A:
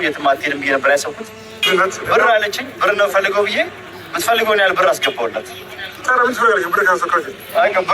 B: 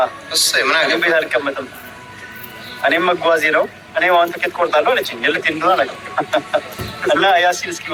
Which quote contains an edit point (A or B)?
A